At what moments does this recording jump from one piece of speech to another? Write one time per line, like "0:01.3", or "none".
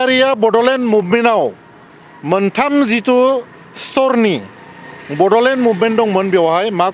none